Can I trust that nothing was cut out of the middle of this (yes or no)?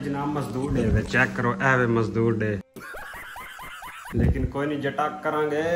yes